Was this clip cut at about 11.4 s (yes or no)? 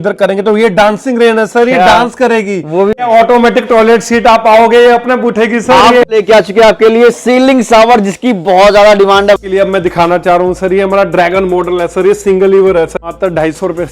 no